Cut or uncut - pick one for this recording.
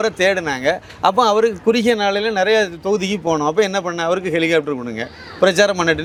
uncut